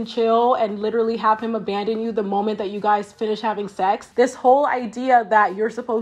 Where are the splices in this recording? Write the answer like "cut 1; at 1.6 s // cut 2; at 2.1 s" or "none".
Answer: cut 1; at 4.1 s